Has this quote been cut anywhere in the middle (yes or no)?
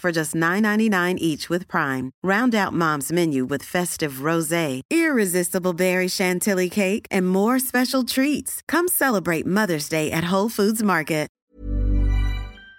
yes